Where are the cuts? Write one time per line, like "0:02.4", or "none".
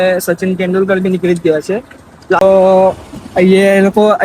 0:02.4